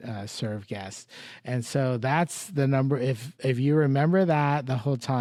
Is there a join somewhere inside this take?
no; 0 cuts

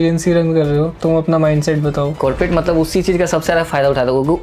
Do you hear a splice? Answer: yes; 1 cut; at 2.2 s

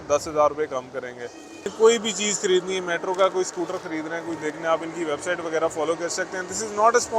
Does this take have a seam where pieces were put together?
yes; 1 cut; at 1.7 s

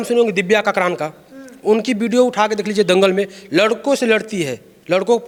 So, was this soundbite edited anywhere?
no; 0 cuts

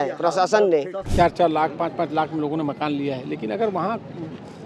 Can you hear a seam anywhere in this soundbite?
yes; 1 cut; at 1.0 s

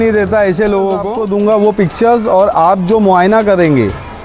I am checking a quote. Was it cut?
yes; 1 cut; at 1.1 s

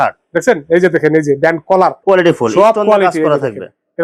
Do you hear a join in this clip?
no; 0 cuts

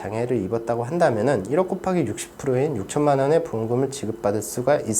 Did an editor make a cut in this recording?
no; 0 cuts

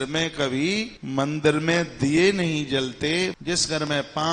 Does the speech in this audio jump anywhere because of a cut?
yes; 2 cuts; at 1.0 s, 3.4 s

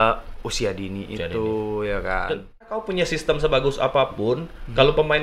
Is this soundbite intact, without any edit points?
no; 1 cut; at 2.9 s

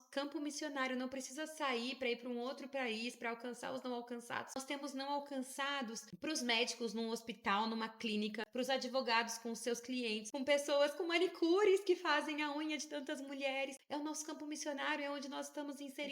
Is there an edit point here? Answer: yes; 5 cuts; at 4.6 s, 6.1 s, 8.4 s, 10.2 s, 13.8 s

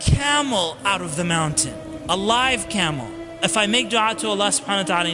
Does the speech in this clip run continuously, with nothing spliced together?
no; 1 cut; at 3.4 s

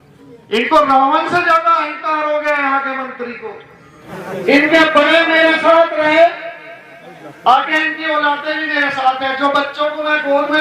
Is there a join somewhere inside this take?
yes; 1 cut; at 4.1 s

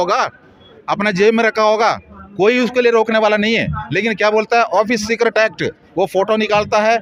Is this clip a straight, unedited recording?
yes; 0 cuts

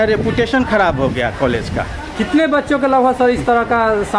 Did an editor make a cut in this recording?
no; 0 cuts

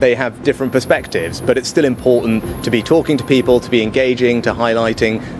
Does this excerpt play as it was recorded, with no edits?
yes; 0 cuts

